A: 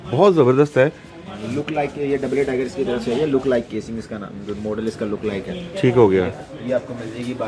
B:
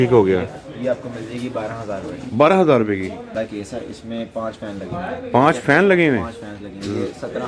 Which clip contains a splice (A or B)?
B